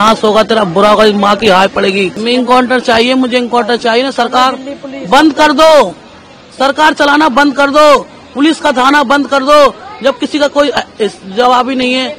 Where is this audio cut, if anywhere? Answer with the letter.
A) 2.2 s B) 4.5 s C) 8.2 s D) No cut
A